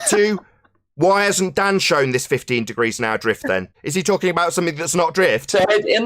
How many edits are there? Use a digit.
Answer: 1